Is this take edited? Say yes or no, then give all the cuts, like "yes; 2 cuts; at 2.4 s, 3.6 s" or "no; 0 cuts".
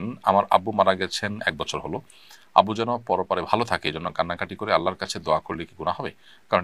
no; 0 cuts